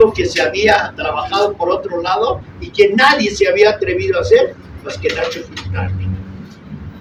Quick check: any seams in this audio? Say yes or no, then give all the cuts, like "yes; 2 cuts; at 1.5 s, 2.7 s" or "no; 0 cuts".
no; 0 cuts